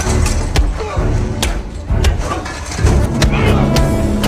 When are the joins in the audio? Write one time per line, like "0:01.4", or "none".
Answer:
none